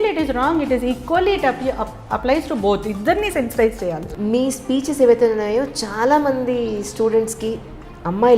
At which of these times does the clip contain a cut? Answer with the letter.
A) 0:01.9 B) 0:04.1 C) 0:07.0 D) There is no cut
B